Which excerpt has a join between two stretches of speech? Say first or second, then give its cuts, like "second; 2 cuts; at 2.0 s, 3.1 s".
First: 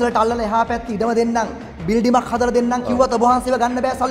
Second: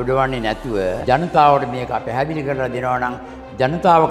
second; 1 cut; at 1.0 s